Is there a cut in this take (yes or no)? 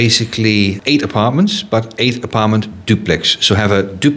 no